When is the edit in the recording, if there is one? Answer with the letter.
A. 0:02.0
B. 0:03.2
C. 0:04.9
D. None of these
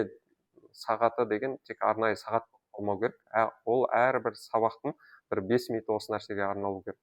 D